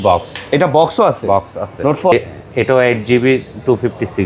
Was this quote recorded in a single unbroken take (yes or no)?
no